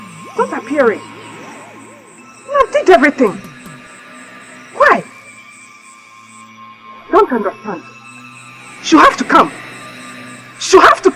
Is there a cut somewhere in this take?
no; 0 cuts

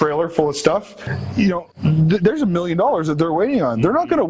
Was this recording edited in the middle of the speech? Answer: yes; 1 cut; at 1.0 s

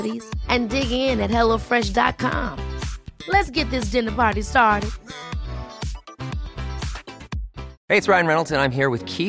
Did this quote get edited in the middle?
yes; 1 cut; at 7.7 s

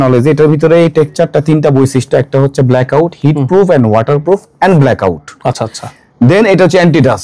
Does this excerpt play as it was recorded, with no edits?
yes; 0 cuts

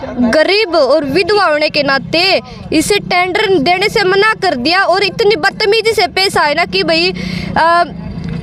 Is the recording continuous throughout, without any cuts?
yes; 0 cuts

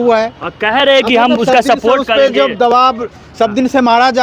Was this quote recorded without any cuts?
yes; 0 cuts

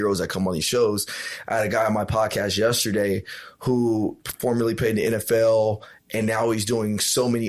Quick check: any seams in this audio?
no; 0 cuts

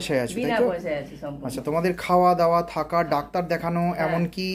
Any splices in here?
no; 0 cuts

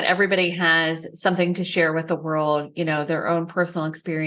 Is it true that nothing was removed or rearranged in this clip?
yes; 0 cuts

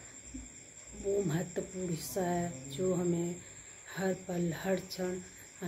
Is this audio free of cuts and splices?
yes; 0 cuts

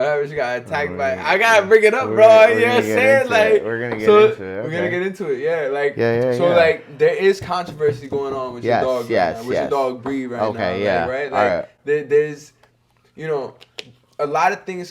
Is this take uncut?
yes; 0 cuts

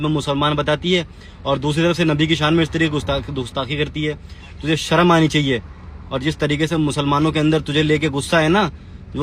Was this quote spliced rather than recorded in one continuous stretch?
no; 0 cuts

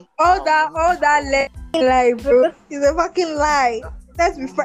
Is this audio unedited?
no; 1 cut; at 1.6 s

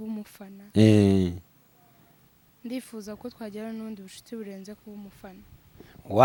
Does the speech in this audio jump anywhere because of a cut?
no; 0 cuts

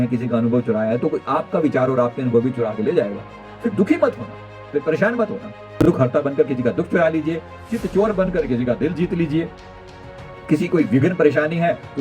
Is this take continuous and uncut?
no; 1 cut; at 5.8 s

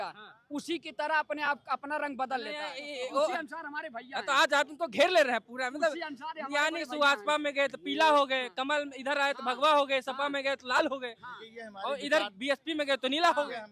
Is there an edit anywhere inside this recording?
no; 0 cuts

